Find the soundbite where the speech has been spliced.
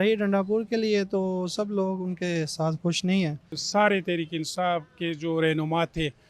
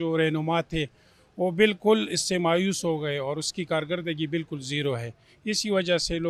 first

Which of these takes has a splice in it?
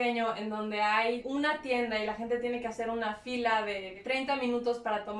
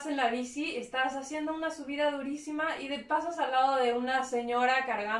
first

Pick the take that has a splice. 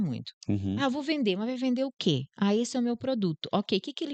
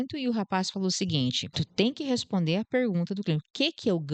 second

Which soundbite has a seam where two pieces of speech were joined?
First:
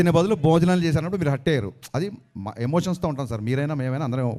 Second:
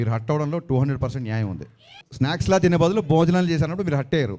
second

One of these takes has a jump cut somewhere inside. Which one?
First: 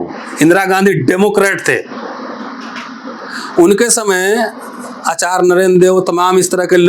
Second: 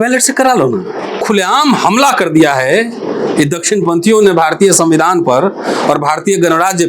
second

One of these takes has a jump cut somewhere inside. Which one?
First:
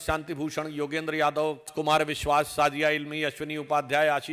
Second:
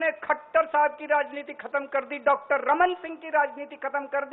first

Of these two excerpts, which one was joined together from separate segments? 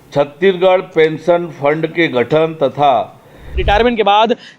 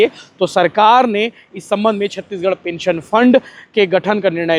first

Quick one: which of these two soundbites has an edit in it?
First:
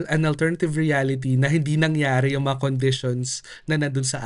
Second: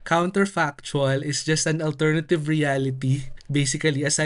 second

